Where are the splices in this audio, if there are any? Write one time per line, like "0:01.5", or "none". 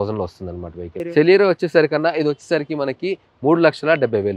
0:01.0